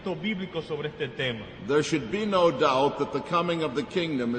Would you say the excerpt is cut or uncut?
uncut